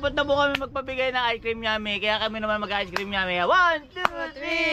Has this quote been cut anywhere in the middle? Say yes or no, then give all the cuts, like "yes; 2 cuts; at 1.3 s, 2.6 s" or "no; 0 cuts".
no; 0 cuts